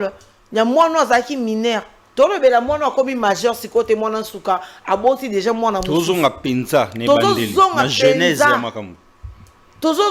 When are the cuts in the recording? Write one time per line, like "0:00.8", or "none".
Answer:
none